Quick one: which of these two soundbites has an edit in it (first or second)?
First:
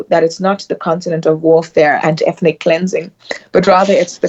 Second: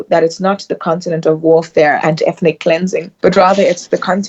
second